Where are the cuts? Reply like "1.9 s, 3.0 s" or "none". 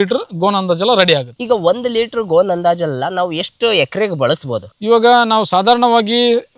none